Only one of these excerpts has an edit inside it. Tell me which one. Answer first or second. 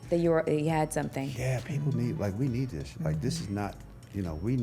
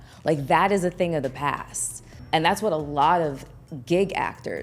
second